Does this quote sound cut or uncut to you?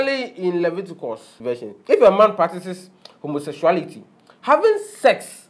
cut